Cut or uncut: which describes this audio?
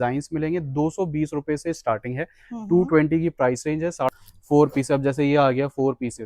cut